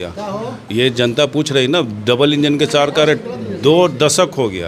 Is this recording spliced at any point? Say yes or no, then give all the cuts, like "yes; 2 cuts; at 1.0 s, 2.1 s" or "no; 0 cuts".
no; 0 cuts